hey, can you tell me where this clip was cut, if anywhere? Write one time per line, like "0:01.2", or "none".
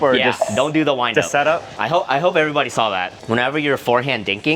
0:01.7
0:03.1